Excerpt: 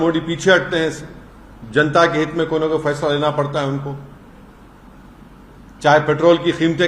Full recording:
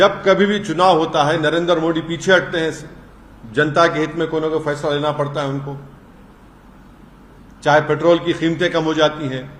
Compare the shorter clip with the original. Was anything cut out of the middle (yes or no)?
no